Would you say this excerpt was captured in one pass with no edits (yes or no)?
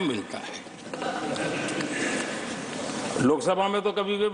yes